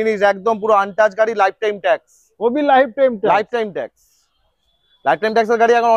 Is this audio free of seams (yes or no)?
yes